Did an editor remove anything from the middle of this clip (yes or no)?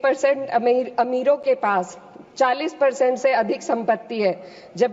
no